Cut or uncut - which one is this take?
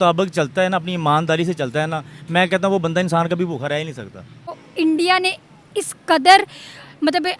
cut